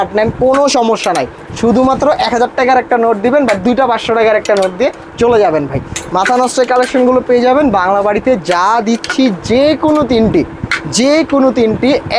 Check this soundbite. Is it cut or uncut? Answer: uncut